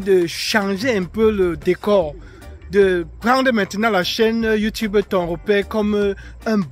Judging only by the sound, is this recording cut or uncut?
uncut